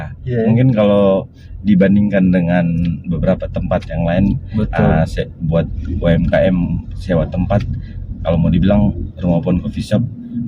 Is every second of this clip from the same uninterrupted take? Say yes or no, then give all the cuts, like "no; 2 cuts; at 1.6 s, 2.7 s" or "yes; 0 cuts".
yes; 0 cuts